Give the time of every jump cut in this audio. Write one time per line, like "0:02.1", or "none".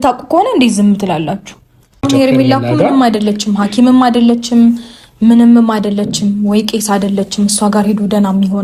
0:02.0